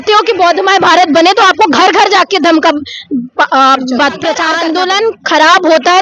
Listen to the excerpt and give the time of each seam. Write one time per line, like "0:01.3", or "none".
0:04.5